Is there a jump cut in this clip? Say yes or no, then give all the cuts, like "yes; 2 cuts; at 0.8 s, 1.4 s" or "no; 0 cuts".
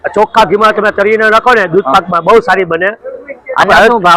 no; 0 cuts